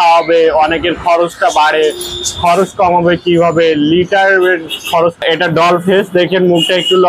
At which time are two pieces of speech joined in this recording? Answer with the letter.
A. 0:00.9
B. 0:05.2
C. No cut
B